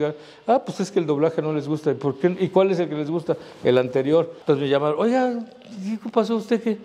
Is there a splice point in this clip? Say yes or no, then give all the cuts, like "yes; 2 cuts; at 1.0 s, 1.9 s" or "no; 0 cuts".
yes; 1 cut; at 4.3 s